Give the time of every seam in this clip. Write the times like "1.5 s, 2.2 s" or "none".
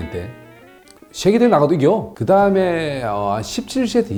none